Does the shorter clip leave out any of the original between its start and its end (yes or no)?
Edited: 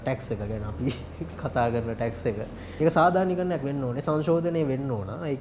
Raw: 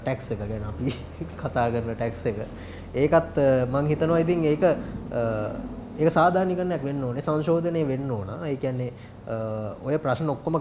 yes